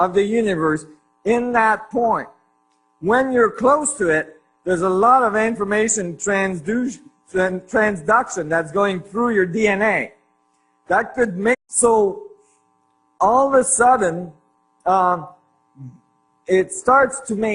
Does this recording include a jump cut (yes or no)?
no